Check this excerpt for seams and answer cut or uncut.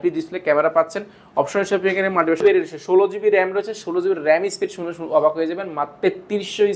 cut